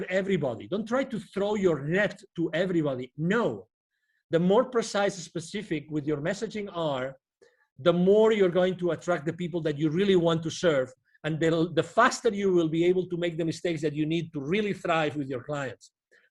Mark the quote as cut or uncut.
uncut